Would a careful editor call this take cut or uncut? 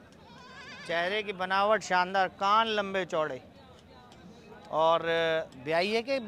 uncut